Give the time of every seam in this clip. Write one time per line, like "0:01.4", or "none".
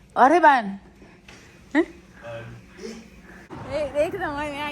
0:03.5